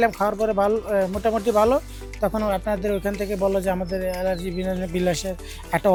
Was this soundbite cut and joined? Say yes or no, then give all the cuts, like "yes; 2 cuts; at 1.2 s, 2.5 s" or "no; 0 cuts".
no; 0 cuts